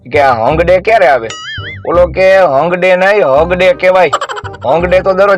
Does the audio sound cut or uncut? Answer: uncut